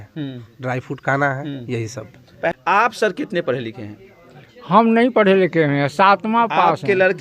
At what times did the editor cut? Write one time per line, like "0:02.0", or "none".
0:02.6